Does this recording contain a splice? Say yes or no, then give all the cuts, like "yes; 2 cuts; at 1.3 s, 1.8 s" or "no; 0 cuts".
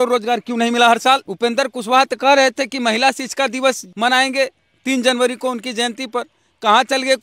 yes; 2 cuts; at 1.3 s, 3.9 s